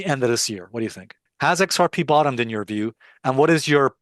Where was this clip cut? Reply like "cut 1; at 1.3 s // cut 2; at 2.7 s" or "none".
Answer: cut 1; at 1.2 s